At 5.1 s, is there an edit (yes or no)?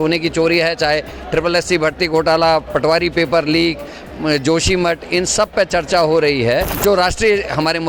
no